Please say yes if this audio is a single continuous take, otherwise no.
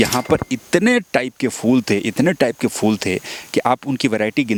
yes